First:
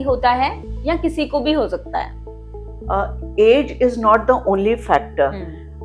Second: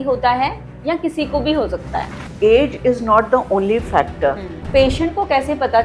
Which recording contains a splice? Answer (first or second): second